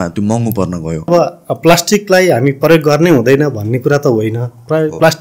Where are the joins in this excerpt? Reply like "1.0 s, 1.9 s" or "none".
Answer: 1.1 s

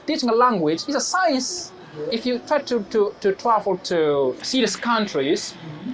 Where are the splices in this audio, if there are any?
2.1 s, 4.4 s

